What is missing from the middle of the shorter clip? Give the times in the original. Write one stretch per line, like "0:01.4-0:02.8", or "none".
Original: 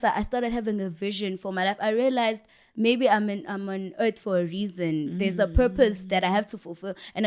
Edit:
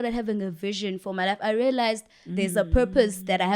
0:02.7-0:05.1